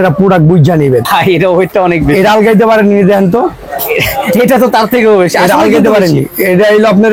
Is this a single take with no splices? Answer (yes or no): no